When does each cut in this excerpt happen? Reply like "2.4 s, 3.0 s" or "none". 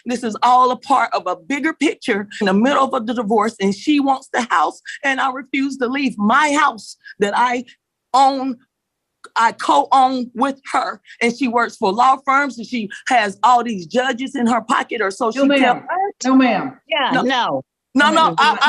2.4 s